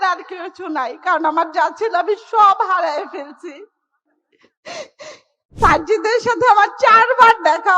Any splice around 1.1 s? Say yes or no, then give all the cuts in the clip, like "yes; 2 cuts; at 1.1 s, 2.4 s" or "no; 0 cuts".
no; 1 cut; at 5.6 s